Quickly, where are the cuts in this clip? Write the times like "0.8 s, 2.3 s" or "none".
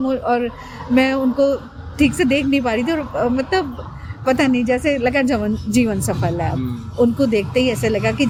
none